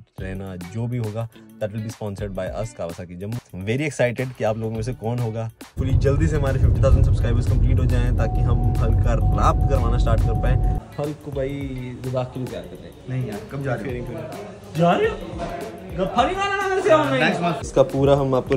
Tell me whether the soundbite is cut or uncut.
cut